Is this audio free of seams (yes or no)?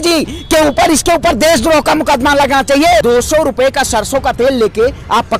no